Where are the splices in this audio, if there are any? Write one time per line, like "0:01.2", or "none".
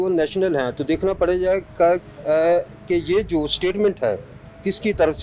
none